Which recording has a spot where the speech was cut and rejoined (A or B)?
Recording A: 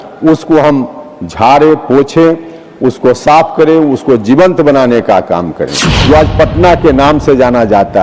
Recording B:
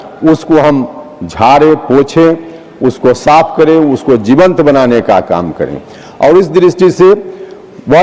A